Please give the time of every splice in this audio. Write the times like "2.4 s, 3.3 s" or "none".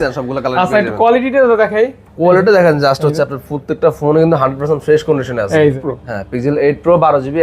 5.9 s

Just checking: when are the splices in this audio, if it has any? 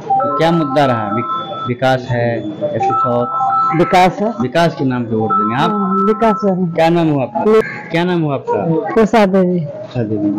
7.6 s

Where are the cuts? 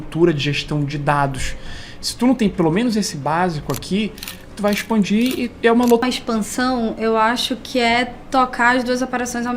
6.0 s

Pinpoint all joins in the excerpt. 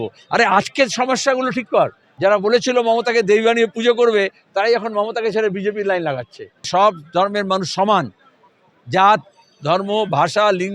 2.0 s, 6.7 s

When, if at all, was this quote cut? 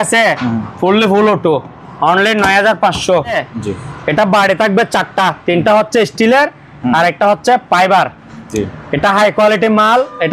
3.5 s

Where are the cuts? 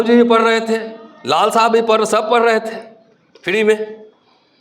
none

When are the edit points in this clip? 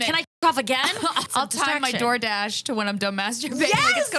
1.2 s

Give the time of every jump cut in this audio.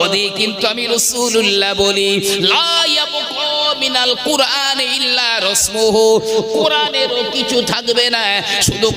none

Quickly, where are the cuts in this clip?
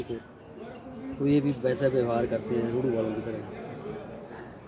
none

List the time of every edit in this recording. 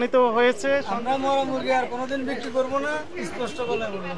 0.9 s

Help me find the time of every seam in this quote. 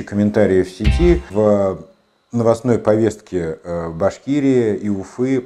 1.3 s

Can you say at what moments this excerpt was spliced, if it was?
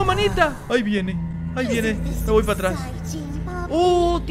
none

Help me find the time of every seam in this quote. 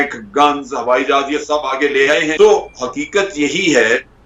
2.3 s

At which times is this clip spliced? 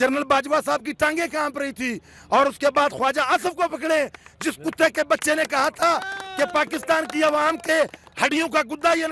none

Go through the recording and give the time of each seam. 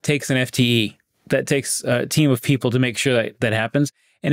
none

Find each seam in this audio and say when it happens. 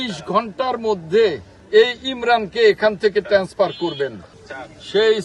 1.5 s, 4.2 s

